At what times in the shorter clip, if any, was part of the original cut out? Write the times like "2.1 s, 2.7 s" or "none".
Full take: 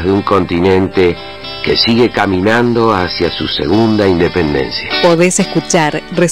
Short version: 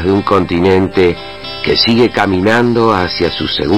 none